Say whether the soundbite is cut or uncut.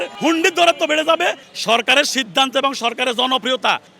cut